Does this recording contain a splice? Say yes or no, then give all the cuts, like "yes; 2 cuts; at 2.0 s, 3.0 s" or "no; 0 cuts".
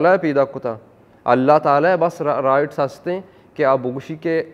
no; 0 cuts